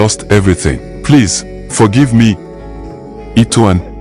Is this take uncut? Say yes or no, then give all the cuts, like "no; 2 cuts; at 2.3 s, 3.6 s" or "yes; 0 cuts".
no; 2 cuts; at 0.9 s, 2.8 s